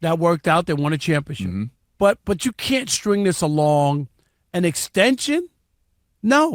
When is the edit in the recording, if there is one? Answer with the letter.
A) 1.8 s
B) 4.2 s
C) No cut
A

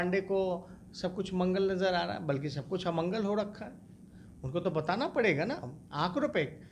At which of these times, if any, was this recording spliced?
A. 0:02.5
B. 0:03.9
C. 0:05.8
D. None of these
D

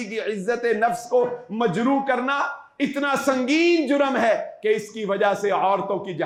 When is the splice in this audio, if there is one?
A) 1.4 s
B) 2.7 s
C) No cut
C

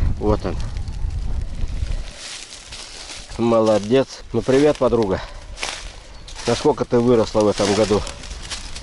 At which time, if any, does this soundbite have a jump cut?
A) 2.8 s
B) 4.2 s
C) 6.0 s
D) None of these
B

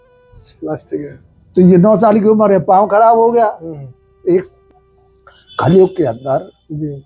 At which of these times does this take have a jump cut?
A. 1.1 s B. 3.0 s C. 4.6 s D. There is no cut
C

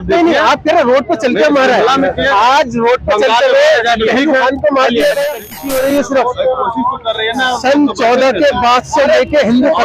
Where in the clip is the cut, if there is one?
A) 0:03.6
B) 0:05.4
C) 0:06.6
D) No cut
B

